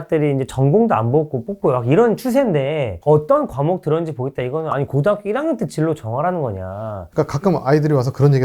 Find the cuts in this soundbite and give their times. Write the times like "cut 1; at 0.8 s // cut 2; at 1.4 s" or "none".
cut 1; at 7.0 s